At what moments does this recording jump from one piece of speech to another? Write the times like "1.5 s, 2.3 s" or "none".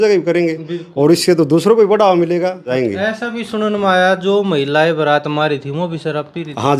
2.7 s